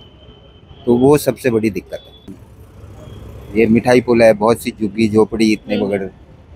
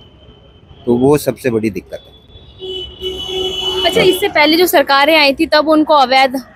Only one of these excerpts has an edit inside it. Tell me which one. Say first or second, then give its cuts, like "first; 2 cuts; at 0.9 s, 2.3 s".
first; 1 cut; at 2.4 s